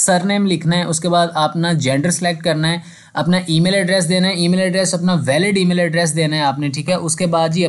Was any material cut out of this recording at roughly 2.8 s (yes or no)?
no